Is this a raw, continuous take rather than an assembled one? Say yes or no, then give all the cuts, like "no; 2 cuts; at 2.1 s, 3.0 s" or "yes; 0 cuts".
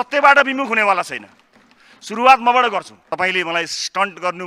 no; 1 cut; at 3.0 s